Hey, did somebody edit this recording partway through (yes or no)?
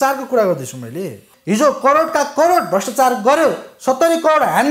yes